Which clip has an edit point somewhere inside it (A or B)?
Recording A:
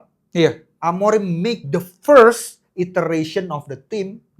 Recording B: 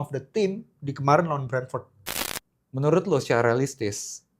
B